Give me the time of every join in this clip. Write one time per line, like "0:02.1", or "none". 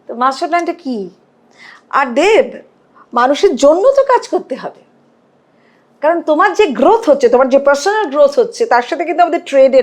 none